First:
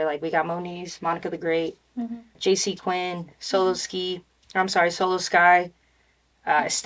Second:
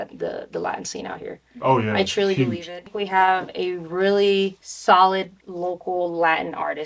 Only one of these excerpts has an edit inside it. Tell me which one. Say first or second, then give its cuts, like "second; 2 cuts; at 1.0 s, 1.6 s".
second; 3 cuts; at 2.8 s, 4.7 s, 5.4 s